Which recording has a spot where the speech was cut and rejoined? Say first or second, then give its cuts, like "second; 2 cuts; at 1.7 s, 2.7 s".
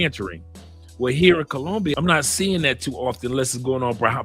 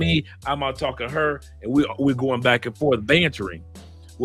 first; 1 cut; at 2.0 s